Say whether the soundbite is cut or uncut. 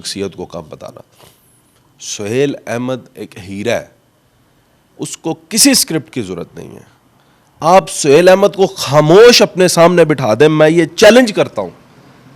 uncut